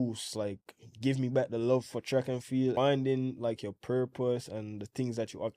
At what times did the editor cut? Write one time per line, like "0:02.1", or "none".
0:02.7